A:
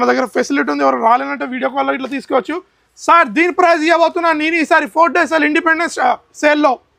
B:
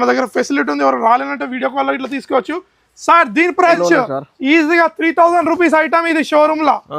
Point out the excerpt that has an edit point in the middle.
B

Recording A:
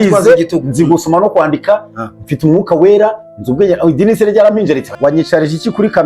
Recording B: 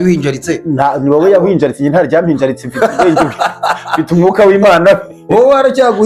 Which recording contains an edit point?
A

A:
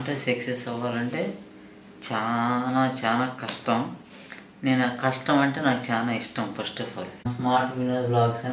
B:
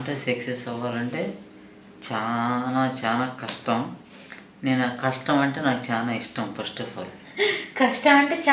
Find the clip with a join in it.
A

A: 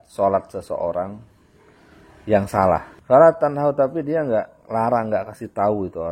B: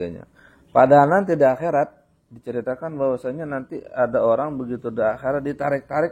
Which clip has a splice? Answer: A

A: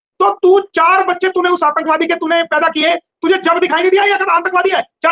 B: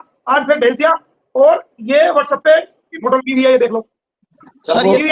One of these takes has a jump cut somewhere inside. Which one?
B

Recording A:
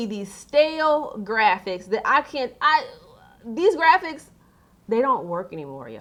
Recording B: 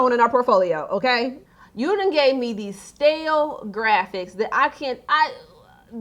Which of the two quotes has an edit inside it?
B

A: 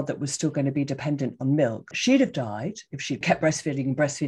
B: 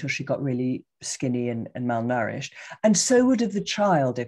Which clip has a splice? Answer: A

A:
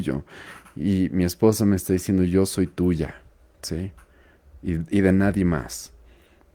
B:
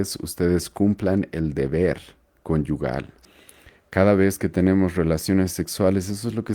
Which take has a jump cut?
B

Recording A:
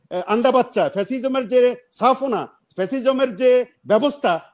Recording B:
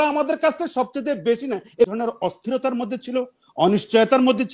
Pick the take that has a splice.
B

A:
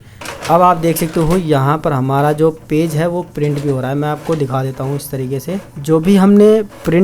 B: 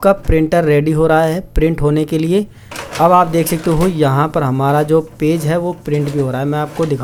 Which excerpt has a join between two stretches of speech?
A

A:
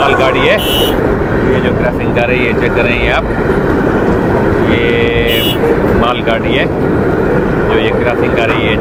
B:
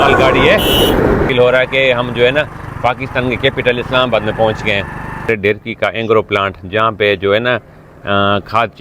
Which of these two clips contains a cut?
B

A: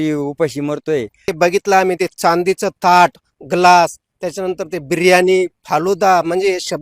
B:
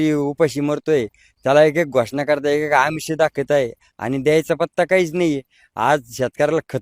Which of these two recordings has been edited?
A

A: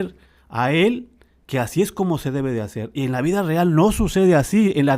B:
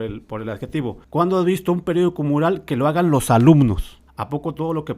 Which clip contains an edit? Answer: B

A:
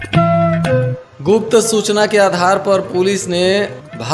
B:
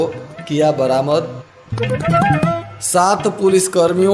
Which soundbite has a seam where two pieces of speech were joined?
A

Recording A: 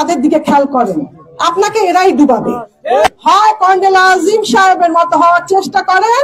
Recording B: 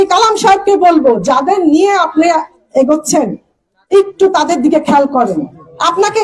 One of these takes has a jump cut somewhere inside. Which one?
A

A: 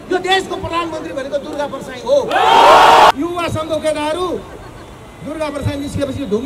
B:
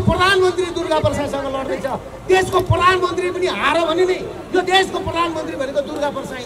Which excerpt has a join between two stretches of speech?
A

